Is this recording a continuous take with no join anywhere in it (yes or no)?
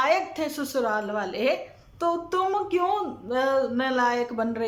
yes